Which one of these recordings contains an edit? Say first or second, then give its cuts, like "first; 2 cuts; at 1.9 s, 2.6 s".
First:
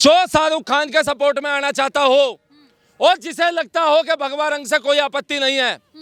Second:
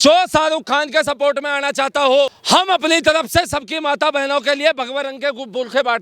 second; 1 cut; at 2.4 s